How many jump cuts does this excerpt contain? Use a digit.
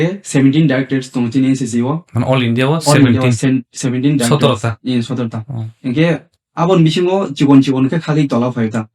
0